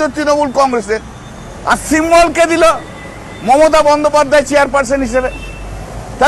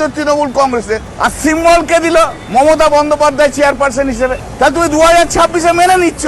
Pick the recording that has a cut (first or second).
second